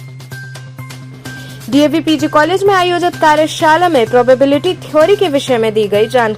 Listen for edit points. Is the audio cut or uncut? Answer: cut